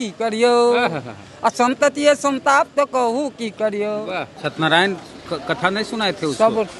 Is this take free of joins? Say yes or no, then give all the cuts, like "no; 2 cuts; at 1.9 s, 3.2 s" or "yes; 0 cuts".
no; 1 cut; at 4.4 s